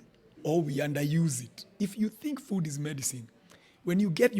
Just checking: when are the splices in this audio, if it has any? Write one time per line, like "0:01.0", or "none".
0:01.6